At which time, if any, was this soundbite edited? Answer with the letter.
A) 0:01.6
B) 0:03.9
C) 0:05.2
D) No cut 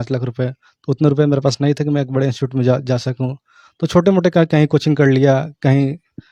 D